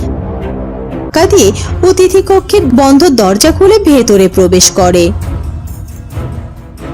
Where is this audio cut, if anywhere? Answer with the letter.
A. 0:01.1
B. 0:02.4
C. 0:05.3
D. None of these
A